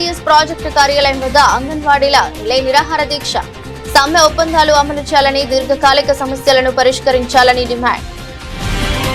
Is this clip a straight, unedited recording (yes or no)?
yes